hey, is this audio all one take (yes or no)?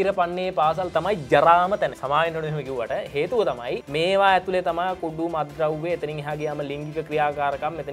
no